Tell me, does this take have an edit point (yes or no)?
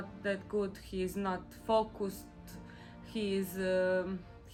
no